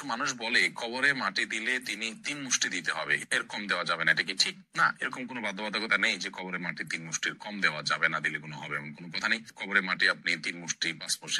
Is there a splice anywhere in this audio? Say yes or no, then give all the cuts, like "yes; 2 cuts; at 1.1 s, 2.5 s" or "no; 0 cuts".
no; 0 cuts